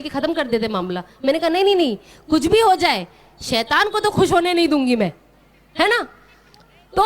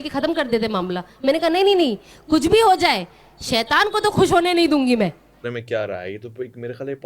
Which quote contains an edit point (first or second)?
second